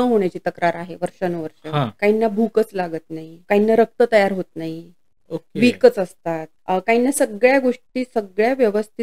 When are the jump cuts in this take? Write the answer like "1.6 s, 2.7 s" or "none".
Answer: 1.9 s, 3.3 s, 6.5 s